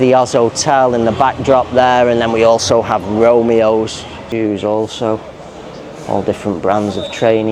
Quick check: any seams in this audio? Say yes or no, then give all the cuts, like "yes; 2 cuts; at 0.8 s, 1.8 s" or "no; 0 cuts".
yes; 1 cut; at 4.2 s